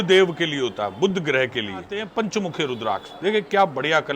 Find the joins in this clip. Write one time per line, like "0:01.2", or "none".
0:02.0